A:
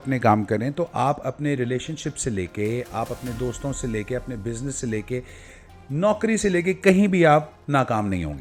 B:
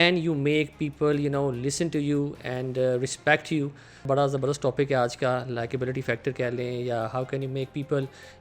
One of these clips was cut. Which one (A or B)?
B